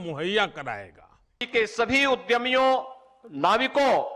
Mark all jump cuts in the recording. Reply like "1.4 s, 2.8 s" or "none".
1.4 s